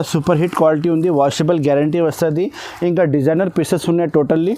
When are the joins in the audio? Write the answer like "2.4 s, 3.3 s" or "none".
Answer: none